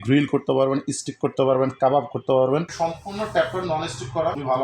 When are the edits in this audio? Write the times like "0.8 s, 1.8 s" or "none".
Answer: 2.7 s